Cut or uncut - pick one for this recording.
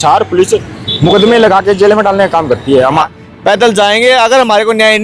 cut